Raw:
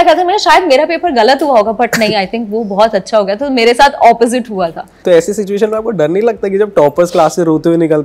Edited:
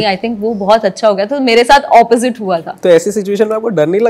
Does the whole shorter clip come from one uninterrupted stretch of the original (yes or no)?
no